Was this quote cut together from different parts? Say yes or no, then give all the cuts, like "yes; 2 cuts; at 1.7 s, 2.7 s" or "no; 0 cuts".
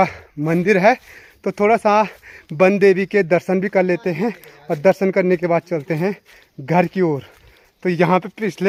no; 0 cuts